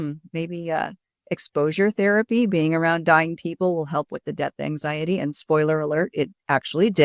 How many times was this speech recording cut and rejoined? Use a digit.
0